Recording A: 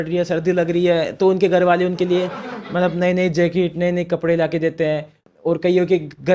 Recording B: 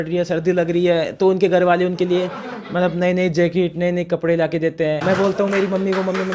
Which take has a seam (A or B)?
B